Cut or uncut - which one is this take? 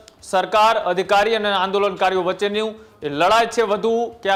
uncut